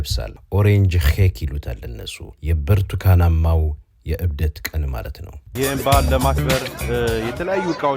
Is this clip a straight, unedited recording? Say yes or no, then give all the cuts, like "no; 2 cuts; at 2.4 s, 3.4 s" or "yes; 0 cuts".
no; 1 cut; at 5.5 s